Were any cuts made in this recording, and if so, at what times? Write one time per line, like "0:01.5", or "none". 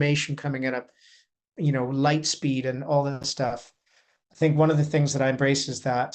none